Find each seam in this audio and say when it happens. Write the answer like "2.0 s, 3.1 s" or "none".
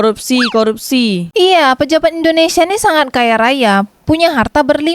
1.3 s